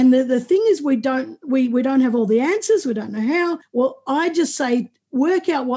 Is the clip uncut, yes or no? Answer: no